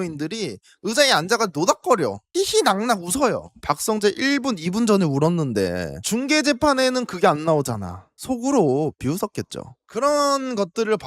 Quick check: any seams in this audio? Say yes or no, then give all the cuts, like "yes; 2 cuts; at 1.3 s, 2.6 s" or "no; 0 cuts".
no; 0 cuts